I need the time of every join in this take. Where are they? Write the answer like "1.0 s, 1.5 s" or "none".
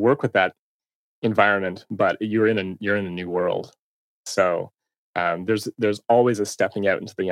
none